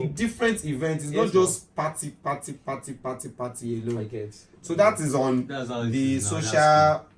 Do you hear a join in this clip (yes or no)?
no